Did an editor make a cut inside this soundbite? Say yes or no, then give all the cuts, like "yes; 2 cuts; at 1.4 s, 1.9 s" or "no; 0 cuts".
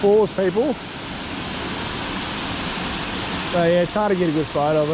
no; 0 cuts